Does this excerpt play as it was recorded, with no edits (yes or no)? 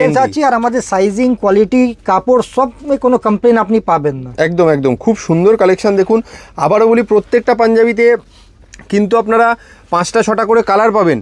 yes